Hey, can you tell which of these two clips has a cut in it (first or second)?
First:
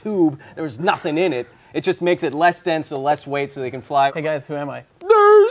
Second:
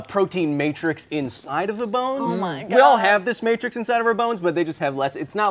first